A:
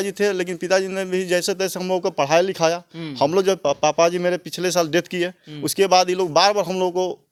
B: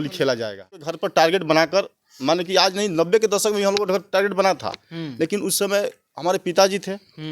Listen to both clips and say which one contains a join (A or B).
B